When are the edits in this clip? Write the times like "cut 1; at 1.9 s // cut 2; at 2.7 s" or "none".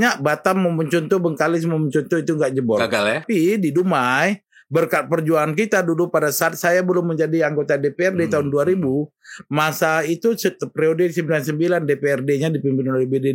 cut 1; at 3.2 s